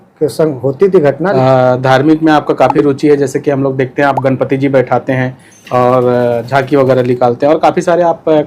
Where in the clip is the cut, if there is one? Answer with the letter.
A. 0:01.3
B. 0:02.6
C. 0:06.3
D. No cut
A